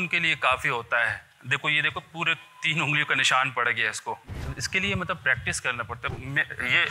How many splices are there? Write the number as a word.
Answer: three